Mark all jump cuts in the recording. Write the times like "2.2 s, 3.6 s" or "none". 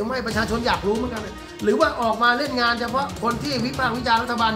none